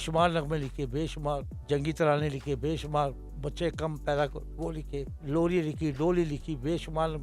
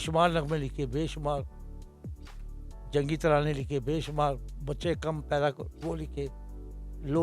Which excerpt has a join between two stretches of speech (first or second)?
first